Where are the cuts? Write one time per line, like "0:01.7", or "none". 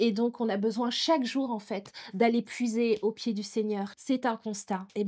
0:03.9